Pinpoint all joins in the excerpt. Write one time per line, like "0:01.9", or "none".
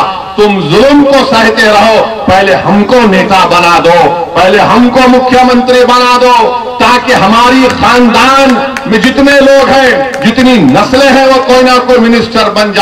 none